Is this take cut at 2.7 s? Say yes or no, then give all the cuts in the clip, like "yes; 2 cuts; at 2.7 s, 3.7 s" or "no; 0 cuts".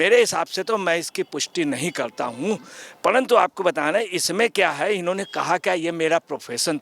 no; 0 cuts